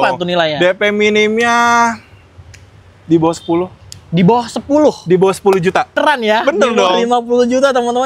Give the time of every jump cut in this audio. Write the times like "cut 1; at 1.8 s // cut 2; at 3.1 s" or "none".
cut 1; at 6.0 s

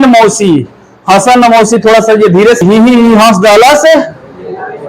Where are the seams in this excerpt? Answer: cut 1; at 2.6 s

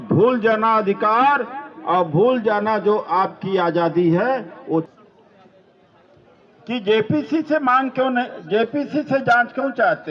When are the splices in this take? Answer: cut 1; at 4.9 s

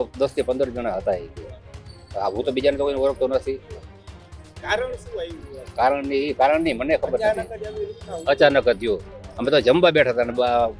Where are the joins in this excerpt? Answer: none

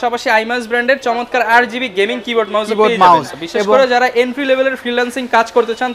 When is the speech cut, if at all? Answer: cut 1; at 3.4 s

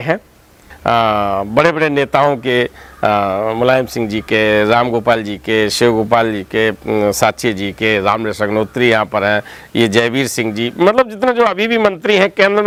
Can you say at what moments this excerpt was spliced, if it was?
none

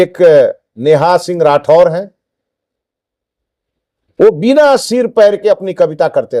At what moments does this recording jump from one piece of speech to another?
none

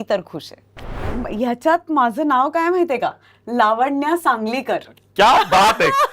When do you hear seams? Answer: cut 1; at 1.0 s

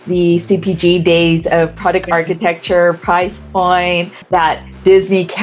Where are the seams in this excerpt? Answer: cut 1; at 4.2 s

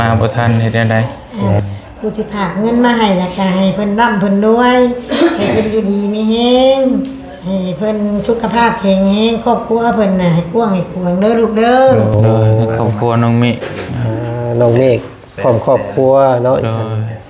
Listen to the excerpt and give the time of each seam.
cut 1; at 1.6 s // cut 2; at 12.1 s

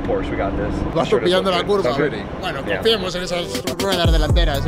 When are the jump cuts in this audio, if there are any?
cut 1; at 0.9 s

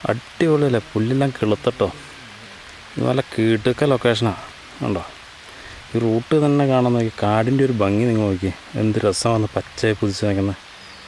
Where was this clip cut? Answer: none

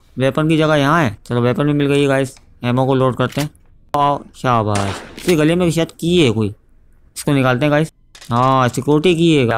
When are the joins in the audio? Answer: cut 1; at 3.9 s // cut 2; at 8.2 s

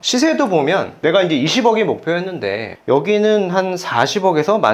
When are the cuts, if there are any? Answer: none

